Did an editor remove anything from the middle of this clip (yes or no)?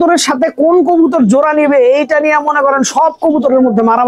no